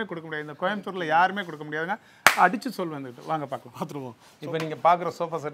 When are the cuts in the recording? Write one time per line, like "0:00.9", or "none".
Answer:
none